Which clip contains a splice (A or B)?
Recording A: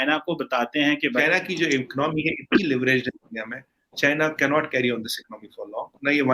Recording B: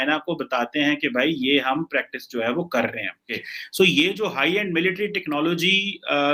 A